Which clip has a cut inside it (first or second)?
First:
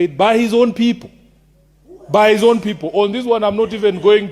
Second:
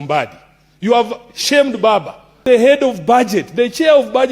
second